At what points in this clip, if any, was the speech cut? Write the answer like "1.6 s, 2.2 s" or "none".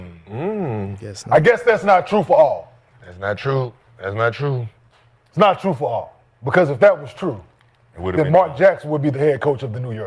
none